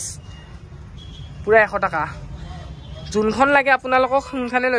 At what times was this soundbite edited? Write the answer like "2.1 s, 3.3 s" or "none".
none